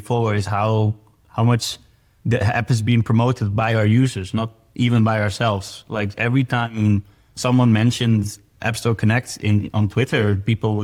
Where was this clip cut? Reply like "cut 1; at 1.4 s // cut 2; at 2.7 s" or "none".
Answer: none